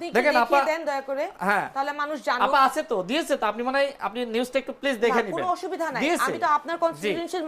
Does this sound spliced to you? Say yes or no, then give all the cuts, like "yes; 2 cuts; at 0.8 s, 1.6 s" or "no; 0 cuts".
no; 0 cuts